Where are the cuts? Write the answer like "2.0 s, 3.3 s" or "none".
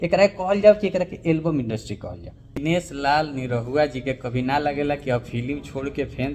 2.6 s